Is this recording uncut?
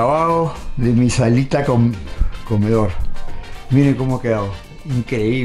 yes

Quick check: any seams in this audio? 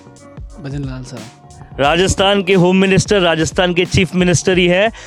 no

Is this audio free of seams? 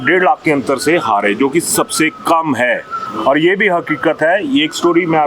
yes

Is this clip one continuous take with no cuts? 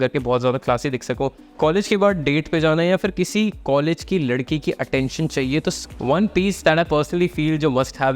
no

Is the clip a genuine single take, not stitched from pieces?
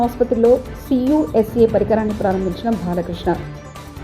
yes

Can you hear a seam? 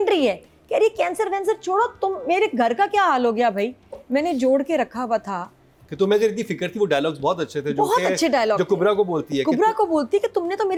no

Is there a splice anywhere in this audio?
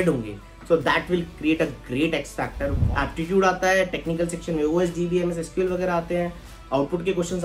yes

